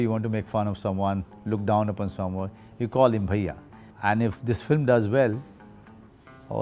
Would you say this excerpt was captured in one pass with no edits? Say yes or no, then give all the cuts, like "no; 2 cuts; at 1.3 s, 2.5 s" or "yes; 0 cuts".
yes; 0 cuts